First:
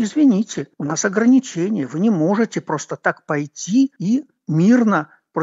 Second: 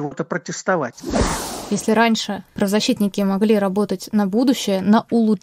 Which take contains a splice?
second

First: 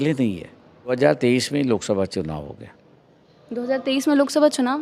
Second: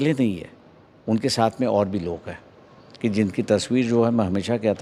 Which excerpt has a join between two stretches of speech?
first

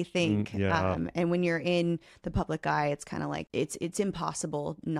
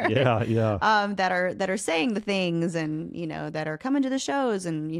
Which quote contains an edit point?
first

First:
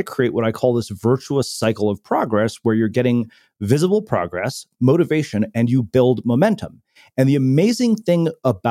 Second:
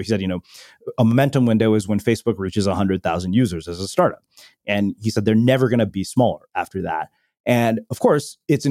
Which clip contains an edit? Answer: second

